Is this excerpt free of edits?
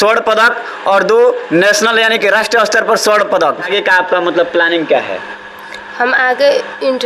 no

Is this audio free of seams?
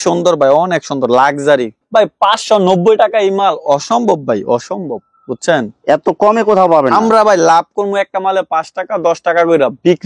yes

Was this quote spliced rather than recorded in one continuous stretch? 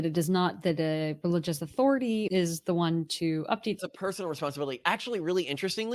yes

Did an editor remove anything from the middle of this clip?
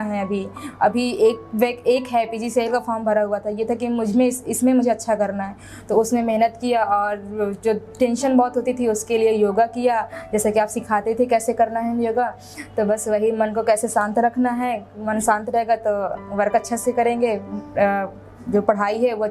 no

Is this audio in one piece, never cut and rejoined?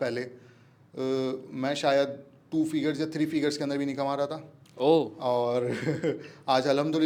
yes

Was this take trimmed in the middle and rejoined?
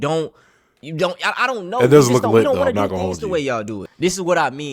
yes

